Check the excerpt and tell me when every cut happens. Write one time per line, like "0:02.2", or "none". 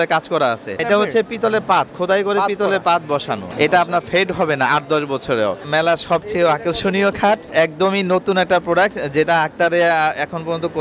0:00.8
0:03.4
0:05.6
0:07.5